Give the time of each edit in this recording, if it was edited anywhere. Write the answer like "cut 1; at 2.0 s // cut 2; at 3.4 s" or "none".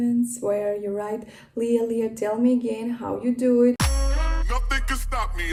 none